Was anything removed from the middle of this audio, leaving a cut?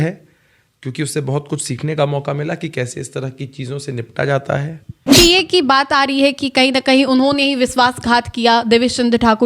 yes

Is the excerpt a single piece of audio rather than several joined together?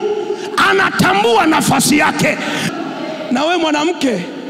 no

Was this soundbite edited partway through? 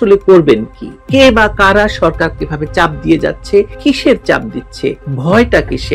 yes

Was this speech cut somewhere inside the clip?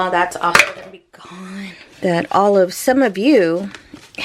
yes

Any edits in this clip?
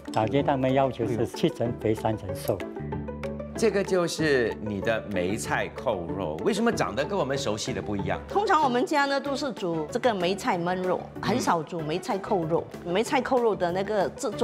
yes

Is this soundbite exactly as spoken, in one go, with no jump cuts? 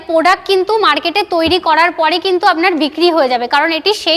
yes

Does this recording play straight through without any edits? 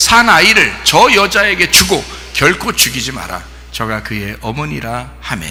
yes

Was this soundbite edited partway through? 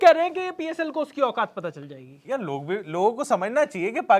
no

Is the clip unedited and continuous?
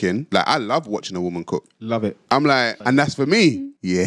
yes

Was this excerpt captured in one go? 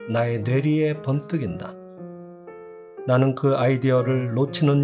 yes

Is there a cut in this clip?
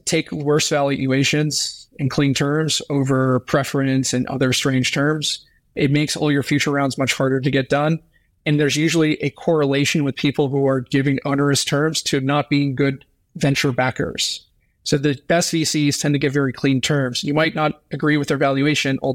no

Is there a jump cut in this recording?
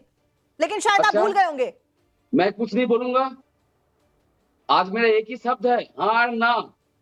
no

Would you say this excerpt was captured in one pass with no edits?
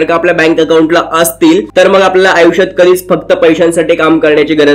yes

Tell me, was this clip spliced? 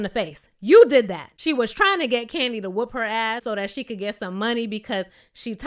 yes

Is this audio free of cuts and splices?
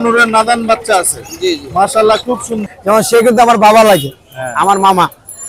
no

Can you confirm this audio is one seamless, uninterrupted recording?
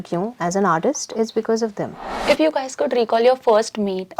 no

